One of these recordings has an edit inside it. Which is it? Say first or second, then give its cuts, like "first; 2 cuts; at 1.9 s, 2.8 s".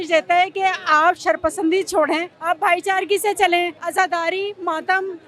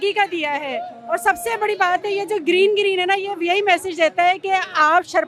first; 2 cuts; at 2.3 s, 3.8 s